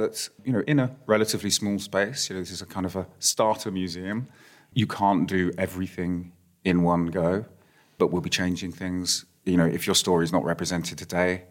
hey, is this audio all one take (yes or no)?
yes